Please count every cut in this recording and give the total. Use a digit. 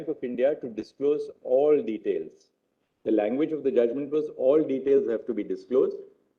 0